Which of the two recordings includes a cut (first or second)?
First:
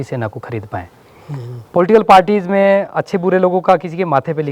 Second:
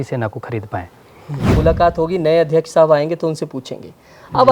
second